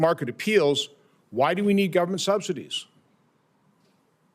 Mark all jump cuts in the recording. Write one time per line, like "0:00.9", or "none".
none